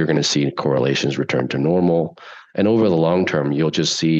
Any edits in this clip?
no; 0 cuts

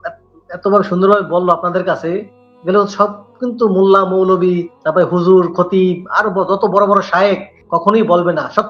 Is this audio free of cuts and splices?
no; 2 cuts; at 4.7 s, 7.5 s

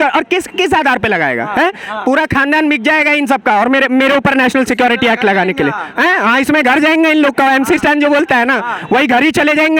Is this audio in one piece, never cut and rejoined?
yes; 0 cuts

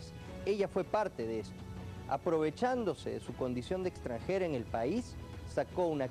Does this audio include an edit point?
yes; 1 cut; at 4.2 s

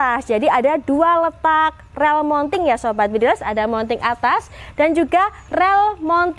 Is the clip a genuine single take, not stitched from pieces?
yes; 0 cuts

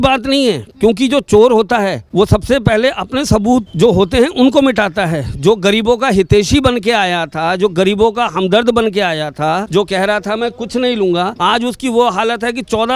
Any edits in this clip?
yes; 4 cuts; at 2.0 s, 3.7 s, 9.7 s, 11.3 s

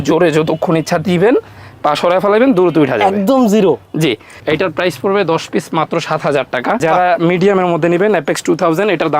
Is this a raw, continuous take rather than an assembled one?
no; 2 cuts; at 4.3 s, 6.8 s

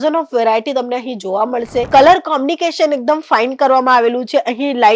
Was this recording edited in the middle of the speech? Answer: yes; 1 cut; at 1.9 s

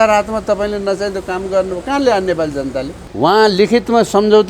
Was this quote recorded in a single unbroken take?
no; 1 cut; at 3.0 s

